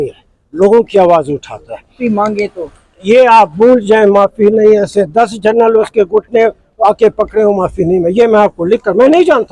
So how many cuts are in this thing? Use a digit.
1